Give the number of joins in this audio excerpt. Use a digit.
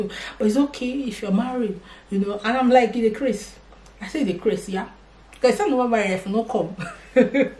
0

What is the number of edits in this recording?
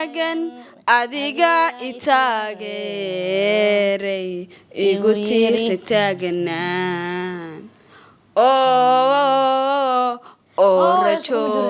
0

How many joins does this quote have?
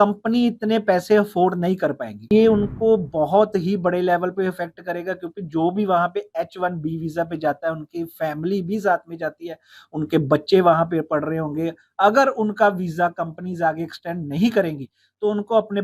1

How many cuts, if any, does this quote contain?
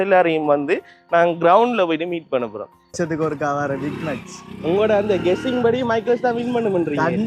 1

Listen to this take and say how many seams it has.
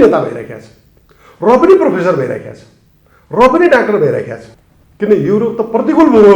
0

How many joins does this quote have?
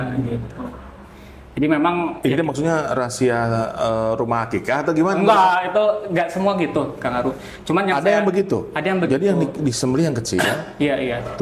0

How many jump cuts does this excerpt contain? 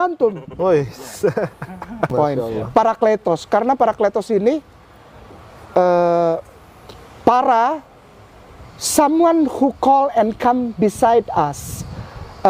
1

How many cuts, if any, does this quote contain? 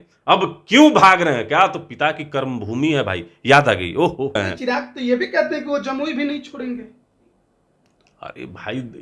1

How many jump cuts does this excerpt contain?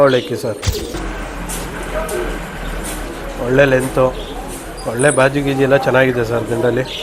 1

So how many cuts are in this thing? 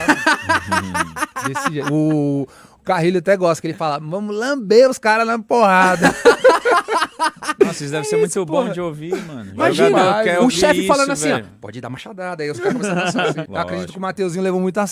1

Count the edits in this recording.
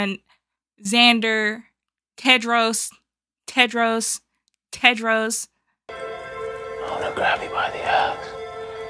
1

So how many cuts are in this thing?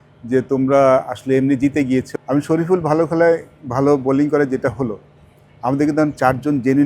1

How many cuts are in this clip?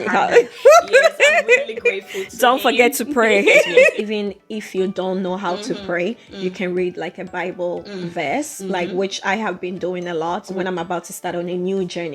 2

